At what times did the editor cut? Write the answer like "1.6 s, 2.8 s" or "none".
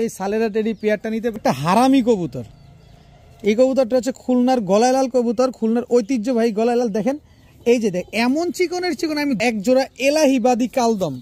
1.4 s, 9.4 s